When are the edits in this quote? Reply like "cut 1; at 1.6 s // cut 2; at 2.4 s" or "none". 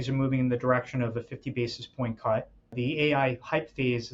cut 1; at 2.7 s